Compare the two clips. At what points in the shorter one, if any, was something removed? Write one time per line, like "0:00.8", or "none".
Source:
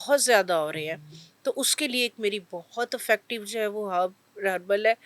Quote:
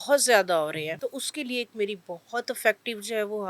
0:01.0